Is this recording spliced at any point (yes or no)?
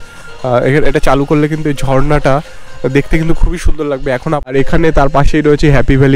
yes